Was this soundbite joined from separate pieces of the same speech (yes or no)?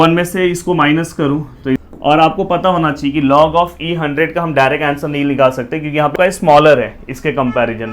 yes